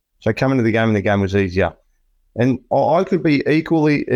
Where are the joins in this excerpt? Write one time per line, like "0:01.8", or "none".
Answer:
none